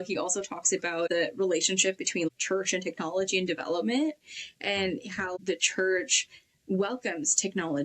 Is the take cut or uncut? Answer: cut